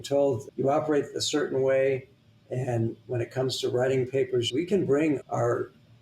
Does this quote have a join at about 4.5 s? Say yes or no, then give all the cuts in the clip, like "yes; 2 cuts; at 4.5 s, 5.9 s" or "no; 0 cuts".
yes; 1 cut; at 4.5 s